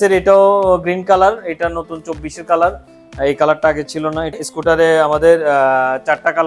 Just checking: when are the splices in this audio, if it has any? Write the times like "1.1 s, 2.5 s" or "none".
4.5 s